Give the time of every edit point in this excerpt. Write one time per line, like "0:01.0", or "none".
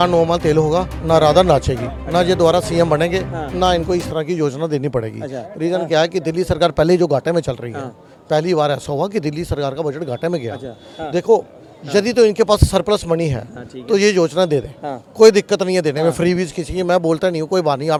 none